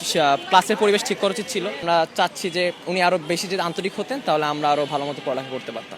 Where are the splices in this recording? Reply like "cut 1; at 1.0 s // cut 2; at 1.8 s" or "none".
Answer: cut 1; at 1.8 s